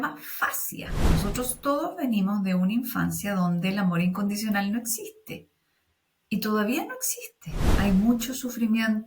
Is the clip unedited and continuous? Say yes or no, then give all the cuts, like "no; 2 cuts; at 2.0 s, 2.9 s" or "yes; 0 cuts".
no; 2 cuts; at 1.1 s, 7.7 s